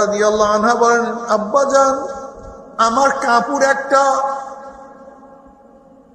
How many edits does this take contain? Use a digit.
0